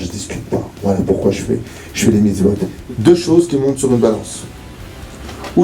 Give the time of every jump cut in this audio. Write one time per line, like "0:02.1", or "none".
0:02.7